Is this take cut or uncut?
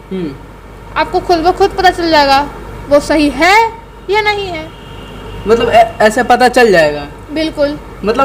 uncut